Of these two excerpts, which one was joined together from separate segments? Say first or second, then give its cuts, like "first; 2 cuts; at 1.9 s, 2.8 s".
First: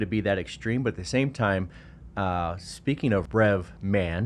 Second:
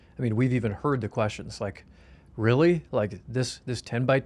first; 1 cut; at 3.3 s